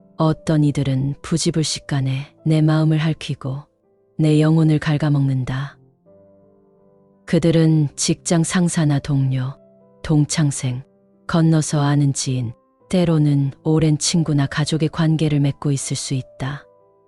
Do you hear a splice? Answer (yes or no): no